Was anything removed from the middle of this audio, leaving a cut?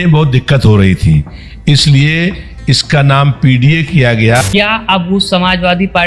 yes; 1 cut; at 4.4 s

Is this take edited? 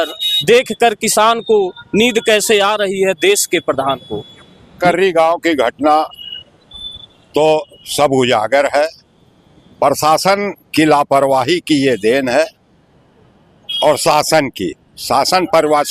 yes; 1 cut; at 4.8 s

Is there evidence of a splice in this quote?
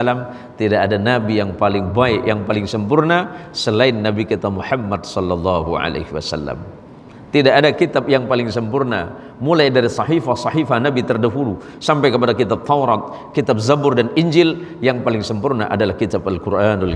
no; 0 cuts

